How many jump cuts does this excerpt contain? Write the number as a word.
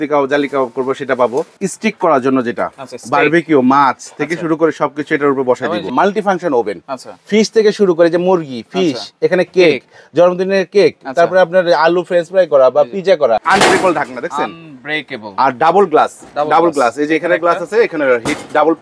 three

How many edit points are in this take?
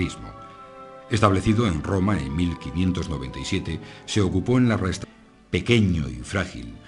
zero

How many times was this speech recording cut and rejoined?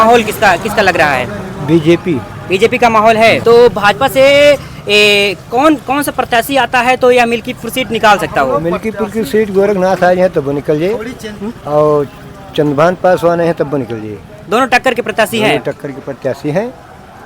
one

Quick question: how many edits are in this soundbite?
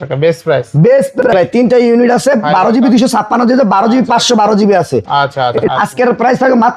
two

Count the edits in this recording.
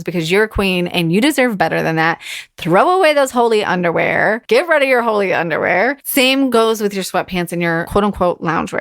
three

